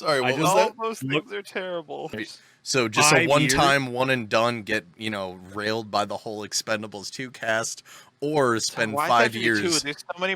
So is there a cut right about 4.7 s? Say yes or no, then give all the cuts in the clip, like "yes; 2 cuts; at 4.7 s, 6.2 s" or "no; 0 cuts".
no; 1 cut; at 2.2 s